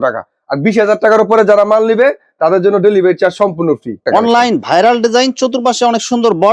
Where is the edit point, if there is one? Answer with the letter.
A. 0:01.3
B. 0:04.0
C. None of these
B